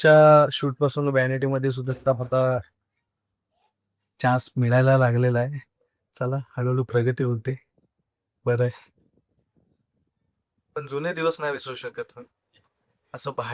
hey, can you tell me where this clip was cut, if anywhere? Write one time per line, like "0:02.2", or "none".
none